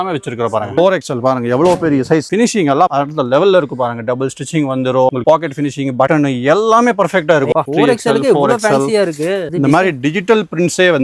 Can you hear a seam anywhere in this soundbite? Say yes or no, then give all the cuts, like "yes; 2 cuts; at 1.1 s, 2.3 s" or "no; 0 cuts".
yes; 4 cuts; at 0.7 s, 2.3 s, 7.5 s, 9.5 s